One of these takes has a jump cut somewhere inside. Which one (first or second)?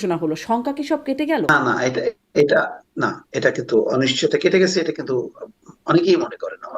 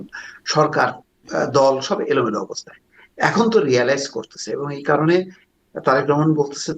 first